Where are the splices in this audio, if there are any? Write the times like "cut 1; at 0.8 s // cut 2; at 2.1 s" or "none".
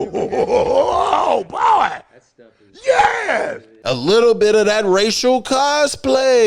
none

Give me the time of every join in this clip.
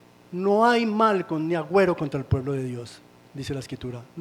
none

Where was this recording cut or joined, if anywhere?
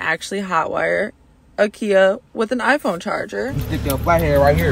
none

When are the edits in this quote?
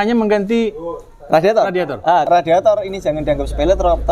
cut 1; at 2.2 s

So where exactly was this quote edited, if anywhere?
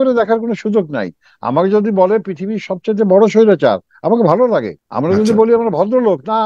cut 1; at 4.8 s

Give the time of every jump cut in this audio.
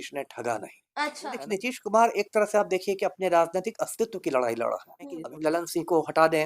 cut 1; at 1.3 s // cut 2; at 5.2 s

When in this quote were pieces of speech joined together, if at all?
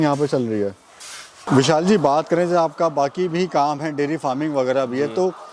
none

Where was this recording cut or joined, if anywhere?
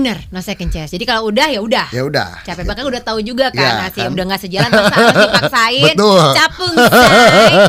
none

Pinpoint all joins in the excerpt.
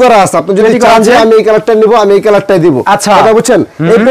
none

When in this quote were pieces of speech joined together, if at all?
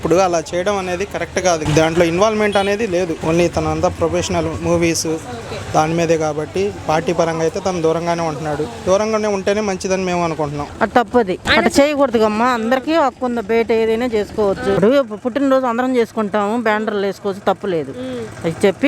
cut 1; at 1.6 s // cut 2; at 3.2 s // cut 3; at 10.6 s // cut 4; at 11.4 s // cut 5; at 14.8 s

